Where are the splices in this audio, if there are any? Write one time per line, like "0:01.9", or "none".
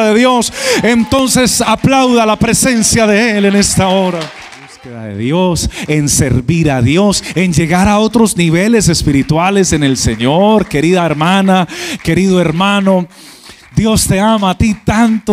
0:05.1

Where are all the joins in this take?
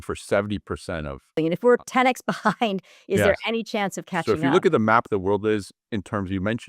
0:01.3
0:04.2

